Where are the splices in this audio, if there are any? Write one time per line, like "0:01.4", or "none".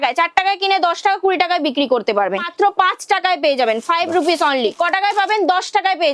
0:02.5
0:04.8

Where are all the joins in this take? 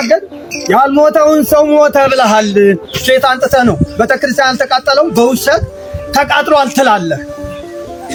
none

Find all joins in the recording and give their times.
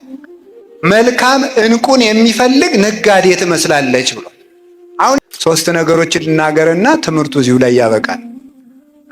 0:05.2

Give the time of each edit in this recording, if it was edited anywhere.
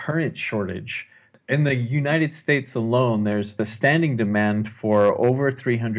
0:01.4
0:03.7

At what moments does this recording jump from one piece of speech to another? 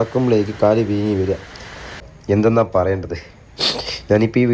0:02.0

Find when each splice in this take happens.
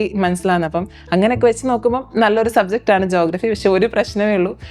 none

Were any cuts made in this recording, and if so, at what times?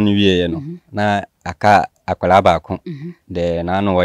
none

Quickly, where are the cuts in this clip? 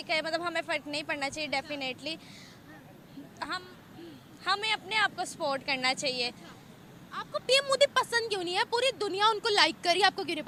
none

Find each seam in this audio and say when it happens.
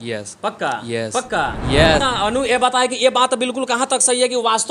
0:02.0

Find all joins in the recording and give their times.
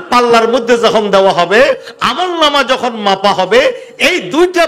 none

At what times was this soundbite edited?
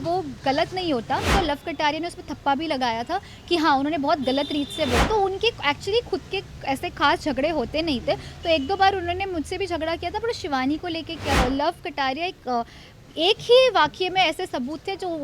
0:01.3
0:05.0
0:11.4

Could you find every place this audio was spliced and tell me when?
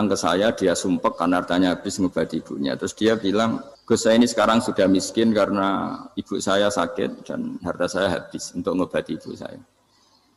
0:03.7

